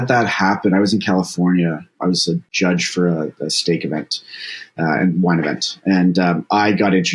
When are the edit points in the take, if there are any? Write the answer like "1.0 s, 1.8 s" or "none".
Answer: 2.1 s